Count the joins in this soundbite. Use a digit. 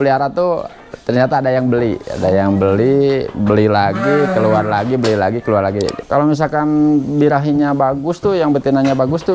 1